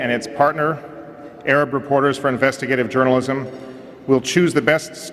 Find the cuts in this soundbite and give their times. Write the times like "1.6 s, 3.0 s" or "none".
none